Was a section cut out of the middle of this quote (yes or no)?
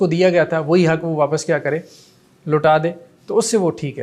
no